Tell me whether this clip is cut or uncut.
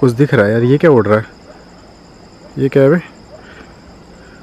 uncut